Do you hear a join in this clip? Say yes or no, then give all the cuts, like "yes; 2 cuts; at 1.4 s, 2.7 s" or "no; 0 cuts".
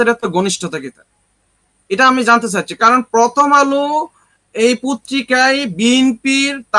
no; 0 cuts